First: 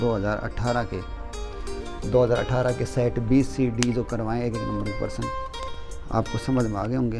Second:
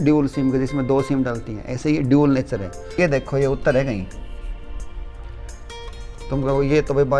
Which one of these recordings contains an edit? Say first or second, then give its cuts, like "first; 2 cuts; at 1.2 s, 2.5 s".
second; 1 cut; at 2.9 s